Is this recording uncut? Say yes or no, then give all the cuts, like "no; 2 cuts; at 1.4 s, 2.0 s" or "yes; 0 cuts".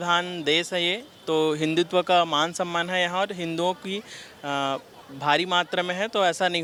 yes; 0 cuts